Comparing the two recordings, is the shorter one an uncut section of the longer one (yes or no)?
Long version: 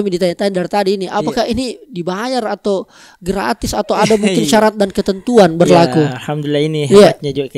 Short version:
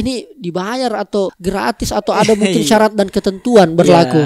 no